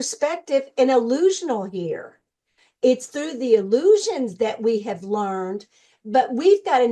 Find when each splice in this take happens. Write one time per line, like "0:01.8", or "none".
none